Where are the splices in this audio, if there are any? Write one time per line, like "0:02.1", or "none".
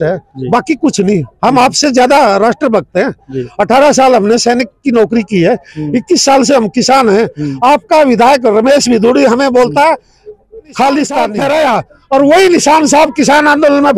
0:11.3

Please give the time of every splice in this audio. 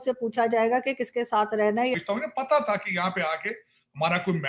0:01.9

